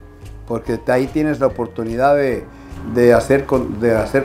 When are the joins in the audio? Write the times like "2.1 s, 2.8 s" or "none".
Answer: none